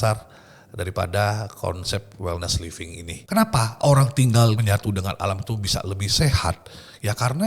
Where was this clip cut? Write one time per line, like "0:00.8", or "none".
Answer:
0:03.1
0:04.6